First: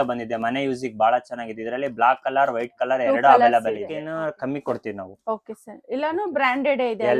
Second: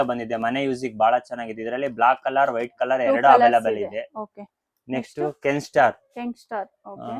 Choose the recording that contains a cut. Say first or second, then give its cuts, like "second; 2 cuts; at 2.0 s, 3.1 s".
first; 1 cut; at 4.0 s